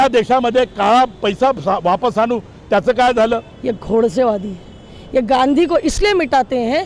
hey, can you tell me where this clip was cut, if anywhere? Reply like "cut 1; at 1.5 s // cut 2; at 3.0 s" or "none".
cut 1; at 3.5 s